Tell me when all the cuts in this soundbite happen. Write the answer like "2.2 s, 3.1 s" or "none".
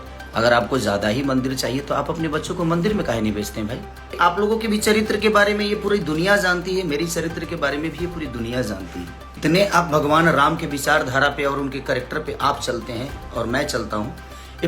4.2 s, 9.3 s